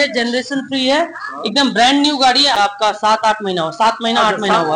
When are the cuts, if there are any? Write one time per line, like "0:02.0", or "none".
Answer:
0:02.5